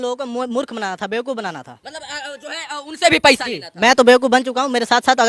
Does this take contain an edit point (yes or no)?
no